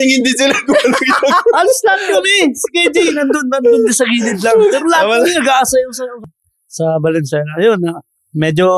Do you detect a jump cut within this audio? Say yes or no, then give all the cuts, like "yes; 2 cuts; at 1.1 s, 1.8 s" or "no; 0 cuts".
yes; 1 cut; at 6.2 s